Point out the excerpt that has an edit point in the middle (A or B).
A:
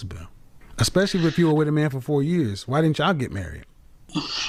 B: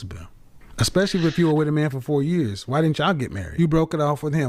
B